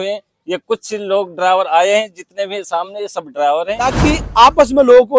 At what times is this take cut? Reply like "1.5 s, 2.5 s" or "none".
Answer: 3.9 s

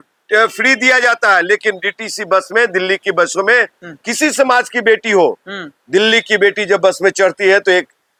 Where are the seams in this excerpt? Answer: none

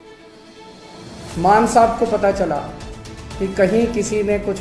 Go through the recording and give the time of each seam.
1.1 s

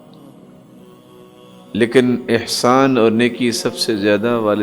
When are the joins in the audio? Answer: 1.7 s

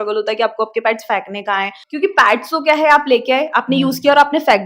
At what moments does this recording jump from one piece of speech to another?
1.8 s

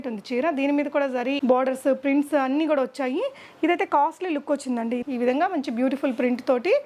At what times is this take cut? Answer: 1.4 s, 5.0 s

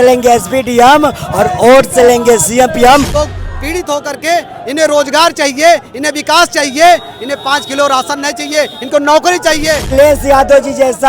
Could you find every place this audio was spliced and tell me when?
3.1 s, 9.9 s

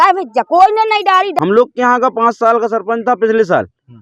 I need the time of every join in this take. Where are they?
1.3 s

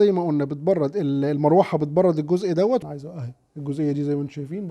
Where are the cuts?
2.9 s

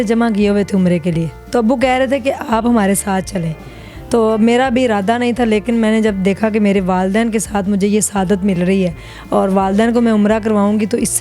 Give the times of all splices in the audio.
none

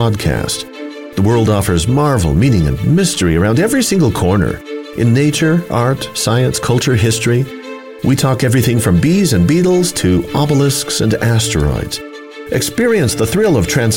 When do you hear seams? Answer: none

